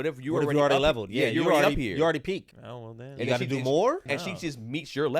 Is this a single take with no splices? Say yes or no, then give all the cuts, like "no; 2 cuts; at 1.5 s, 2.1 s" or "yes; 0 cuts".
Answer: no; 2 cuts; at 2.5 s, 4.1 s